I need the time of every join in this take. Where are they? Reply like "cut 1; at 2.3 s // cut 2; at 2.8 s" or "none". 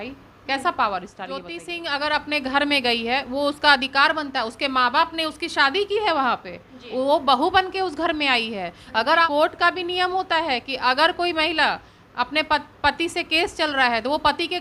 cut 1; at 1.6 s // cut 2; at 9.3 s